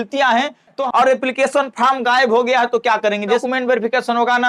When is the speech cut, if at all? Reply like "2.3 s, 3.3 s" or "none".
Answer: 0.8 s, 3.4 s